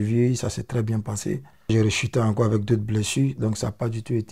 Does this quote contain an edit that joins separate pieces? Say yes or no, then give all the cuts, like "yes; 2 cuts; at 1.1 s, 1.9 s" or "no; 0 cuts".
yes; 1 cut; at 1.7 s